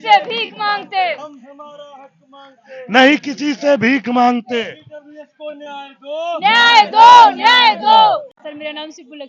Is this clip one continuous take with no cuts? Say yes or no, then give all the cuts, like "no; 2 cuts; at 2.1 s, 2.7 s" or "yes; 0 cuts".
no; 1 cut; at 8.3 s